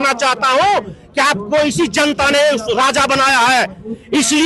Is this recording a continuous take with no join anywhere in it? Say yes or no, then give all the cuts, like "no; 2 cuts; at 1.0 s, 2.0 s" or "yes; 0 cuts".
yes; 0 cuts